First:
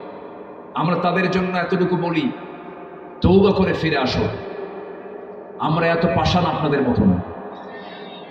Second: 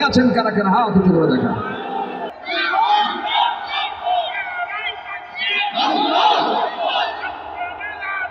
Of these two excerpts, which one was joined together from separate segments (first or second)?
second